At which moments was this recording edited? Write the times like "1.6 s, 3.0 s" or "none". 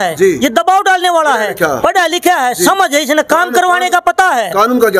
none

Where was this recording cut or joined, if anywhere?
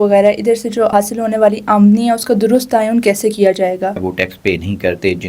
0.9 s, 4.1 s

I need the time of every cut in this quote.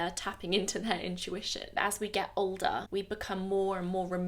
1.7 s, 2.8 s

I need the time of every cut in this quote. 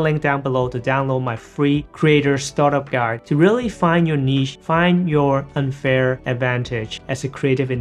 none

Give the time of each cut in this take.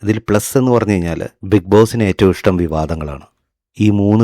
1.3 s

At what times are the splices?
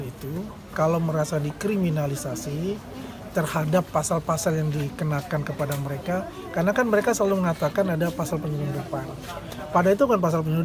none

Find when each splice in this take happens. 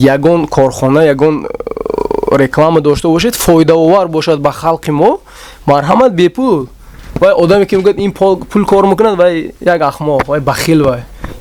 none

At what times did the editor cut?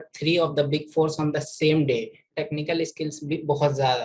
2.3 s

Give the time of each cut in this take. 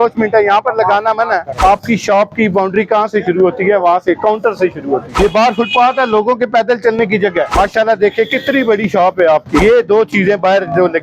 1.5 s, 5.1 s, 7.5 s, 9.6 s

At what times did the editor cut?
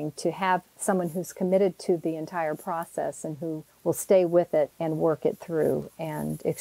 3.7 s, 4.8 s

